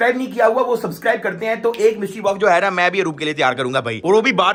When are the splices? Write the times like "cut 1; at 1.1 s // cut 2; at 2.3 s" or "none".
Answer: none